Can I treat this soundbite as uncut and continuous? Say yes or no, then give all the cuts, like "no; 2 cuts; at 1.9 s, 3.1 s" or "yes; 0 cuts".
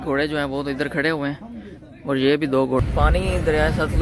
no; 1 cut; at 2.8 s